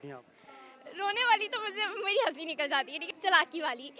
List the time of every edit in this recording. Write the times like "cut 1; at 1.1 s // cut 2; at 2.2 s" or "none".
cut 1; at 3.0 s